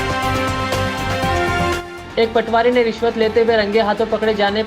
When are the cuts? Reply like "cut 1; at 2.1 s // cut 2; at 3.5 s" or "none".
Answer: none